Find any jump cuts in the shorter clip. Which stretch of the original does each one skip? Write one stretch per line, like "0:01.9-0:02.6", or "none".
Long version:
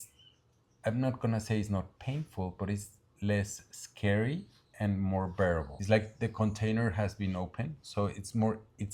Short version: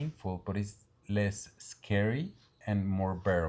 none